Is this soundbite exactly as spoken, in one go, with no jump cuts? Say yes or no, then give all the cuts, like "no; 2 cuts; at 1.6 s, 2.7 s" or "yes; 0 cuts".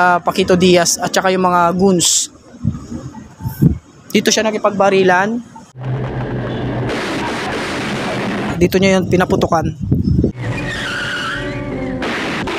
no; 1 cut; at 8.5 s